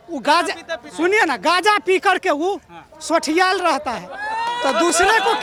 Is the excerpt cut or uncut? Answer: uncut